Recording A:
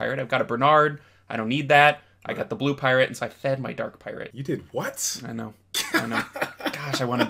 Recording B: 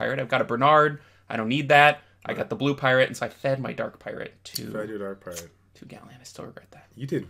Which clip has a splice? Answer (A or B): A